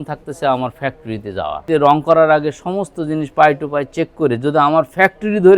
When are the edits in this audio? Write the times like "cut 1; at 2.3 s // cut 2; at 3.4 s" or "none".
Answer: cut 1; at 1.7 s